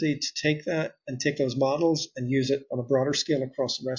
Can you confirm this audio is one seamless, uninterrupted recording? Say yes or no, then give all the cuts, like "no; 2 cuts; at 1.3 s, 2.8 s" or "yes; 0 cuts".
yes; 0 cuts